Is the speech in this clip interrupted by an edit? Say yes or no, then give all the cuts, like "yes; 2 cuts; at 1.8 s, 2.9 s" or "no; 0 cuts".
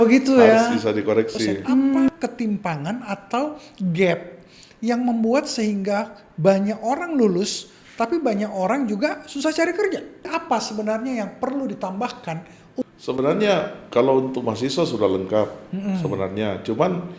yes; 3 cuts; at 2.1 s, 10.3 s, 12.8 s